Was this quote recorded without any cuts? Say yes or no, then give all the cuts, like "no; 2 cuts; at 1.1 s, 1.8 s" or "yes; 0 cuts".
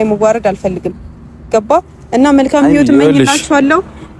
yes; 0 cuts